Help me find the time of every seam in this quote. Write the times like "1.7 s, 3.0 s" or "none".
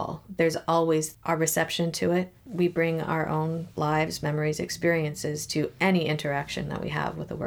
1.1 s, 2.4 s